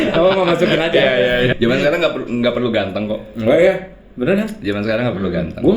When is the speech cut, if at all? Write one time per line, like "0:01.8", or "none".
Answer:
0:01.5